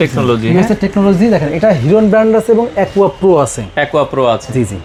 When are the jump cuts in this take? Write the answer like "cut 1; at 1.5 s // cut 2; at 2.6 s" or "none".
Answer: none